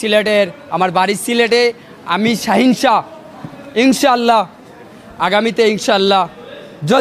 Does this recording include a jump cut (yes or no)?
no